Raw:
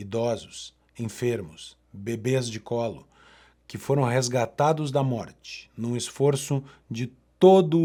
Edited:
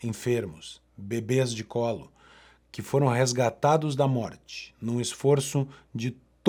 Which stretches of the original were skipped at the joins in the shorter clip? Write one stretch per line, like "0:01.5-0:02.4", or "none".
none